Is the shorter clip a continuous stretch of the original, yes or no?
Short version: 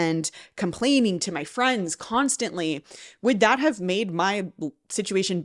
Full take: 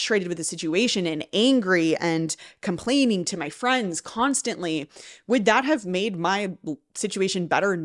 yes